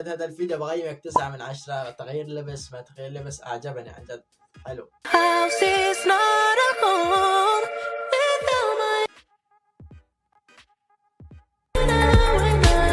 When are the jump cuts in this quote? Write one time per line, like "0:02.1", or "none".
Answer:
0:05.1